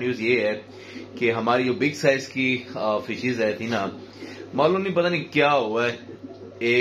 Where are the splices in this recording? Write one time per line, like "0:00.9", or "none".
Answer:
none